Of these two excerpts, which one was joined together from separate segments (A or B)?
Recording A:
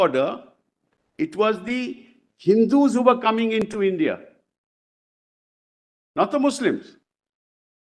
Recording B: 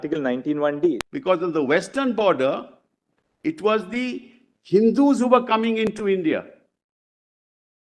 B